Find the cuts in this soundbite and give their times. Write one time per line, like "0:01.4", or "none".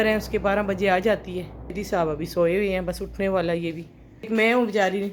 0:01.8
0:04.3